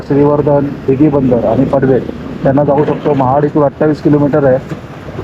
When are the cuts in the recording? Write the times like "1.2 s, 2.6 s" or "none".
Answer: none